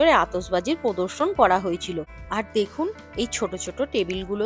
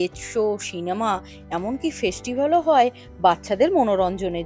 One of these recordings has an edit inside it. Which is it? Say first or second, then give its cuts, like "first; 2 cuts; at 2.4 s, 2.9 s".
first; 1 cut; at 2.1 s